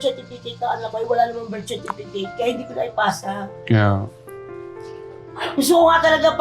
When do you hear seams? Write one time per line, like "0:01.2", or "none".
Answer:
none